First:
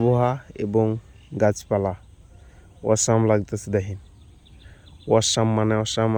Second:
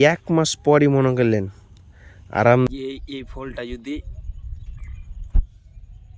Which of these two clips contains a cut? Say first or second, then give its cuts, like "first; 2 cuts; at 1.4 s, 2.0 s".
second; 1 cut; at 2.7 s